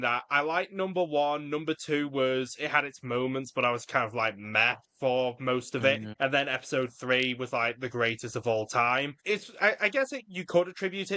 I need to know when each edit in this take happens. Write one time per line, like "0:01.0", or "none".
0:06.1
0:09.1